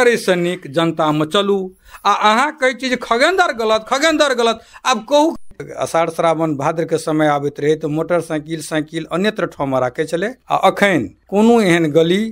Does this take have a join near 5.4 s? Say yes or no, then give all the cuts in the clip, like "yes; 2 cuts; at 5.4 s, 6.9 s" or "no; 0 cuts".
yes; 1 cut; at 5.4 s